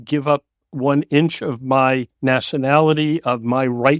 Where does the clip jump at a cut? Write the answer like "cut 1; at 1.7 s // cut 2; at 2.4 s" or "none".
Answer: cut 1; at 2.1 s